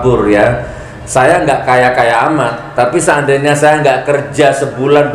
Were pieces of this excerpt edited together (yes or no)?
no